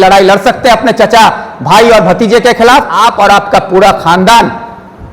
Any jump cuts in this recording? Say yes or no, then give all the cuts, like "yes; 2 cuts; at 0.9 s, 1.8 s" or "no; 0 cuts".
yes; 1 cut; at 2.9 s